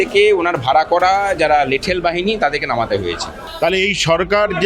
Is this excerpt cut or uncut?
cut